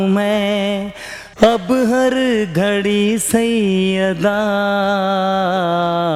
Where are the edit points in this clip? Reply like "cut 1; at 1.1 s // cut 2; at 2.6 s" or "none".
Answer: none